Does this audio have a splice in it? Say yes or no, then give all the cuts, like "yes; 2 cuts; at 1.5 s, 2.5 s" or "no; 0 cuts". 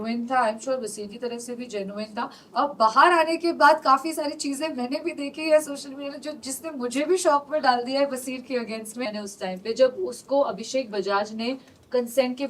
yes; 1 cut; at 9.1 s